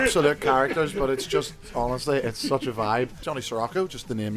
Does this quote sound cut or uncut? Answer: cut